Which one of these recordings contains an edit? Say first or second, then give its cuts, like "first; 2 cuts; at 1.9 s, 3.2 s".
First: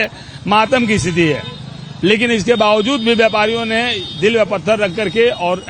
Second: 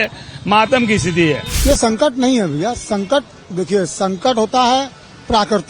second; 1 cut; at 1.5 s